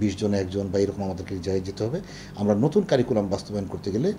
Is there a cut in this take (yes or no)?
no